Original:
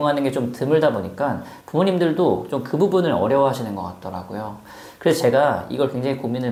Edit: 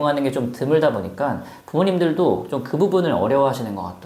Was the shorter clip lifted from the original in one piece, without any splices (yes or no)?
yes